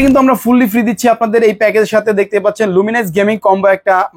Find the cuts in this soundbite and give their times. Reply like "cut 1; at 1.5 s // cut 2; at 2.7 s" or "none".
none